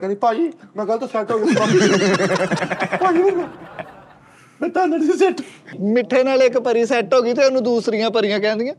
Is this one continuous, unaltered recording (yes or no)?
yes